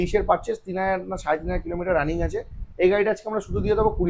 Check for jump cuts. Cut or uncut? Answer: uncut